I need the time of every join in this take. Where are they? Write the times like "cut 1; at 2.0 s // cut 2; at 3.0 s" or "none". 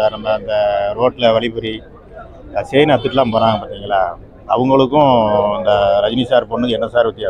none